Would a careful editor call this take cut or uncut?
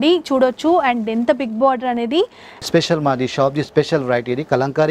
cut